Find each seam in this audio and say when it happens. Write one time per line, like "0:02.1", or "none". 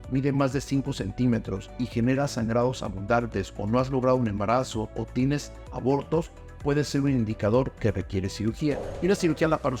0:08.9